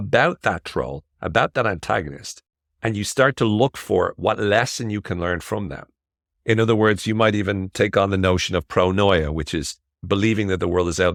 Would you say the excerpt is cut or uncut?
uncut